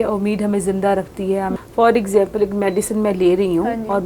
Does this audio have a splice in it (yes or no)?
yes